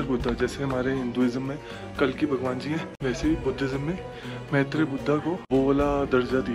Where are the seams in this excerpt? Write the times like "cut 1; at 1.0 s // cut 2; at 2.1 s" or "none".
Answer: cut 1; at 2.9 s // cut 2; at 5.4 s